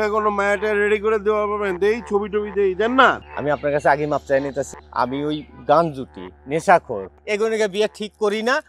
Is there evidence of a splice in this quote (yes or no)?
yes